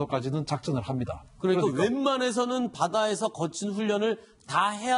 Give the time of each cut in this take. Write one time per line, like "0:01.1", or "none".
none